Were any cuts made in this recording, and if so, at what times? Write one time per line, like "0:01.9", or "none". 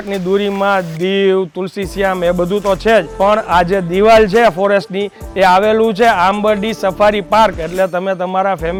none